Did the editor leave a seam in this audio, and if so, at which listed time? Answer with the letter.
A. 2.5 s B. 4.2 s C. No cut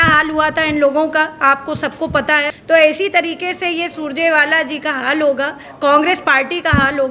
A